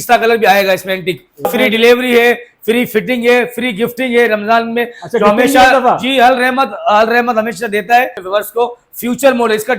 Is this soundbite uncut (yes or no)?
no